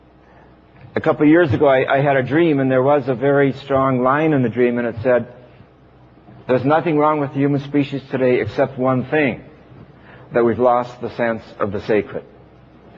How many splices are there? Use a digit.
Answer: 0